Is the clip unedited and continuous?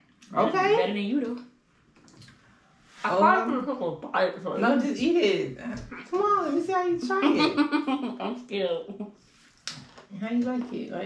yes; 0 cuts

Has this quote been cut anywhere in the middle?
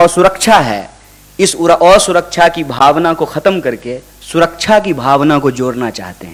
no; 0 cuts

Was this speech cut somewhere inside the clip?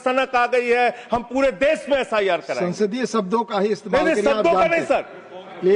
no; 0 cuts

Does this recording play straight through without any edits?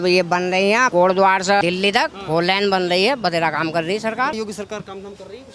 no; 2 cuts; at 0.9 s, 4.4 s

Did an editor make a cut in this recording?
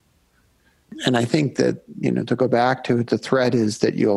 yes; 1 cut; at 0.9 s

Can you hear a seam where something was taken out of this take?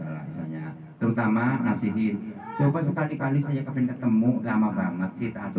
no; 0 cuts

